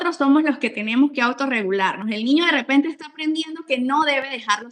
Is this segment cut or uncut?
uncut